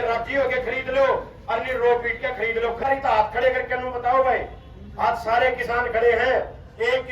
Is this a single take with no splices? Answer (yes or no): no